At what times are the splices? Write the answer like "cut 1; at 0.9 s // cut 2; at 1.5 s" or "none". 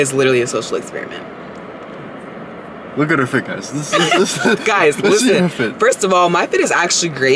none